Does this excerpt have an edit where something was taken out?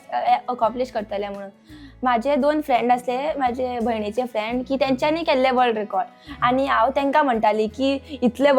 no; 0 cuts

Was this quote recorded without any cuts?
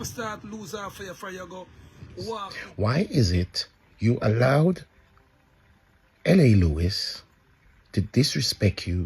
no; 1 cut; at 2.6 s

